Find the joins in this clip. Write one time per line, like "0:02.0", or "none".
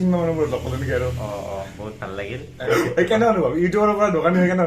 0:02.6